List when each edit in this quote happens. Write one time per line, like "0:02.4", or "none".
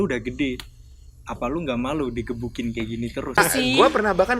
0:03.4

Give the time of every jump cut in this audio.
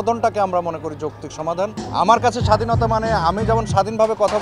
0:01.8

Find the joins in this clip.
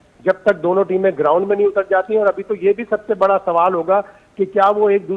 none

